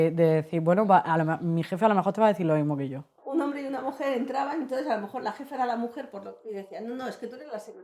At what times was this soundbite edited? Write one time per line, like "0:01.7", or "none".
0:03.2